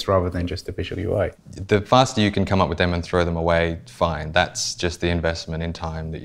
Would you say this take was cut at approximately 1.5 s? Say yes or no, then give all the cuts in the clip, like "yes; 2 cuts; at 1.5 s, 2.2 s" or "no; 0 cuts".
yes; 1 cut; at 1.5 s